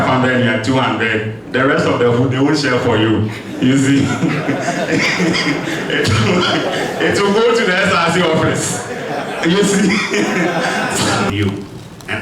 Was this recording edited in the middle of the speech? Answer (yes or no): yes